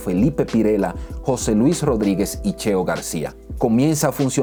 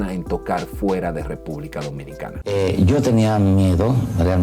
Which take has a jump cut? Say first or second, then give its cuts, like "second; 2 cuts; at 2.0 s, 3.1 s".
second; 1 cut; at 2.5 s